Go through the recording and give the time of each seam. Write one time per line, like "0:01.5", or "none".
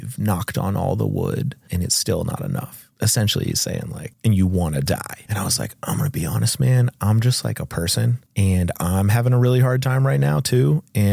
0:01.6
0:02.8
0:04.0
0:05.2
0:08.2